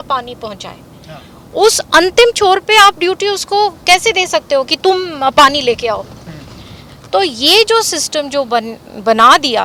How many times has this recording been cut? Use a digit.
0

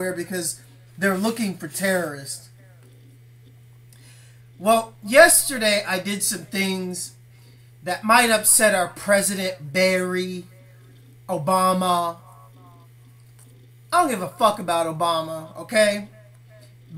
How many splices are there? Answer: 0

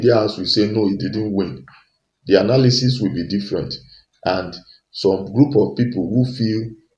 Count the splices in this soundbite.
0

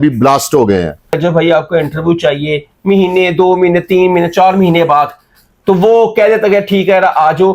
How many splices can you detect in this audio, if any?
1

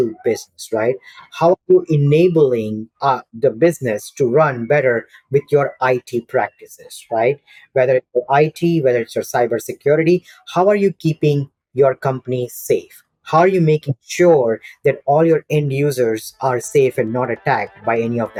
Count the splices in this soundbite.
0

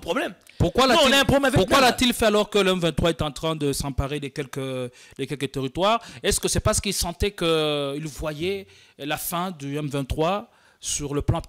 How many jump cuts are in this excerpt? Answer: 0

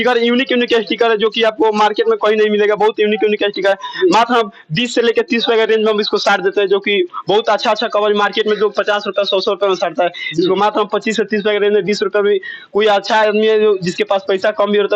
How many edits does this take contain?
0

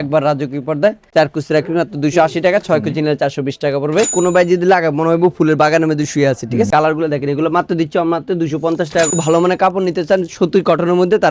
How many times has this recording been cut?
3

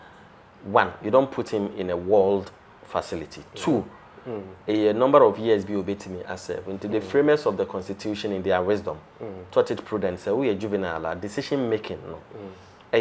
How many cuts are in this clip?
0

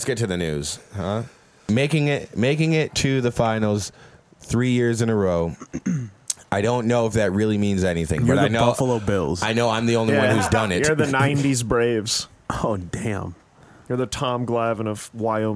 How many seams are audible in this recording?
1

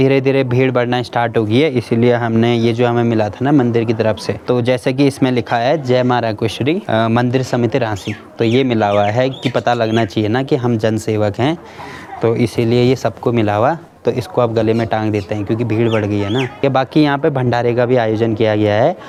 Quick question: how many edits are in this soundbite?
0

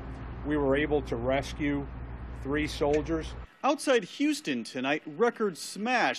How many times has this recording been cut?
1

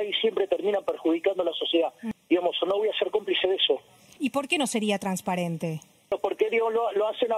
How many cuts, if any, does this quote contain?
3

